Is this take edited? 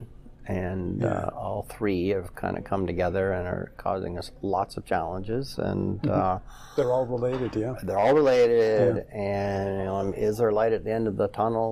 no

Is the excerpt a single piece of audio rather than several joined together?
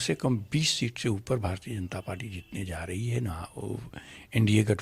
yes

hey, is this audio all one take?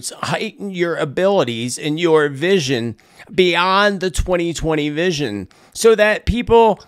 yes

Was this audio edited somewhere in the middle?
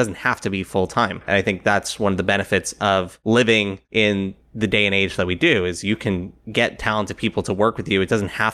yes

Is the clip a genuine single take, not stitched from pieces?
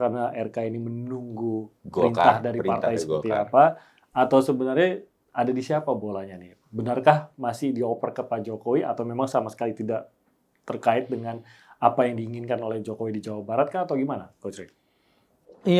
yes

